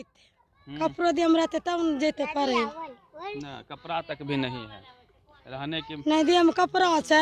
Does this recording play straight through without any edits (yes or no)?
yes